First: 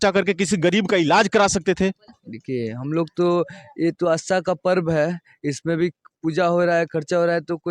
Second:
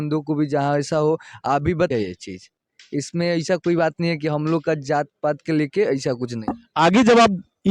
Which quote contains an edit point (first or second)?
second